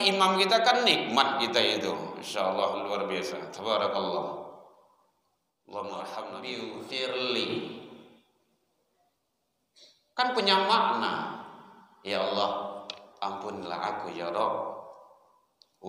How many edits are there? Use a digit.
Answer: 1